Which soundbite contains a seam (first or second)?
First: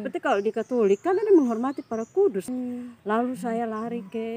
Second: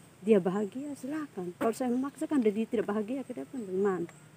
first